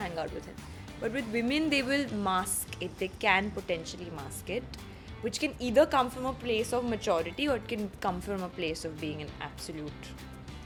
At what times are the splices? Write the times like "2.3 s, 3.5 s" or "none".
none